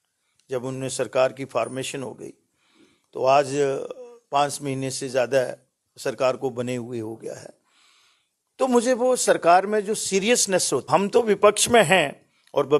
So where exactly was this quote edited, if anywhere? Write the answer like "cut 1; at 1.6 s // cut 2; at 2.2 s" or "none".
cut 1; at 10.9 s